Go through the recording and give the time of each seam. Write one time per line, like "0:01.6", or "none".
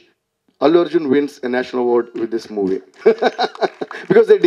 0:02.9

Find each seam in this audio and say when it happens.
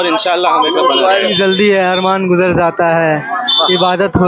0:01.3

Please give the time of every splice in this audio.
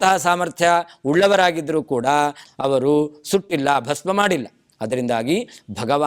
0:02.4

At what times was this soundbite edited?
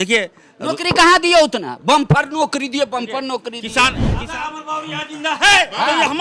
0:04.1

